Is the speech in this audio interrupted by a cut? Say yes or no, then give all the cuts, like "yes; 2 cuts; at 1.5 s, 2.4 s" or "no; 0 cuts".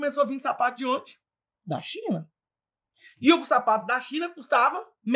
no; 0 cuts